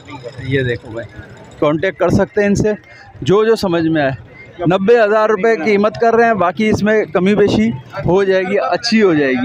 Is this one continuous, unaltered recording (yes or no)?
yes